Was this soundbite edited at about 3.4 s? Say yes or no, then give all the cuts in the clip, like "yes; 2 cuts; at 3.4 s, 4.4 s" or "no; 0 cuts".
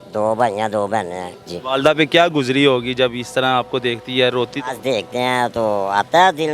no; 1 cut; at 1.4 s